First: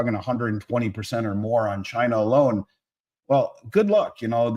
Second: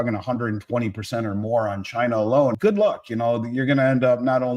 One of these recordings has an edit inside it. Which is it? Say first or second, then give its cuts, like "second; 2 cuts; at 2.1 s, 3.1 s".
second; 1 cut; at 2.6 s